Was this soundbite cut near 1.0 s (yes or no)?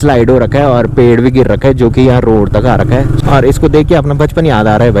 no